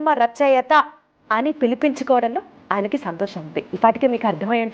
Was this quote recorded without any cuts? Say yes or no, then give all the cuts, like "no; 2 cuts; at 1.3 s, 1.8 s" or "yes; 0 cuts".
no; 1 cut; at 3.7 s